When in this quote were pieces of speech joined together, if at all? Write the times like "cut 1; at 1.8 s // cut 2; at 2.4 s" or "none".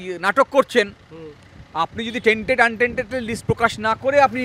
none